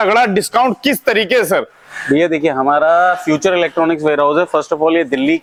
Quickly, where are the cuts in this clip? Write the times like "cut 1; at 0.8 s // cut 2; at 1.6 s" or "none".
none